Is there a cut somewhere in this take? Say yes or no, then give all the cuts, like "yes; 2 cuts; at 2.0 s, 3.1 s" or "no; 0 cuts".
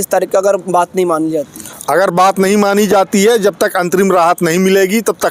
no; 0 cuts